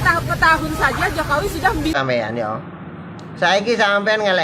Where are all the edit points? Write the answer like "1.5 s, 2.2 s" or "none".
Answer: 2.0 s